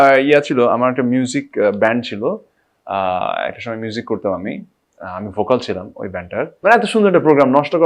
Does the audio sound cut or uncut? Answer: cut